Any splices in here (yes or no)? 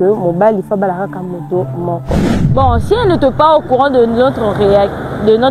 yes